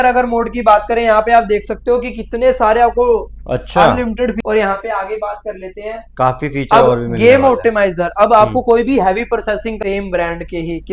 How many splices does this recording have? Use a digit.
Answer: 2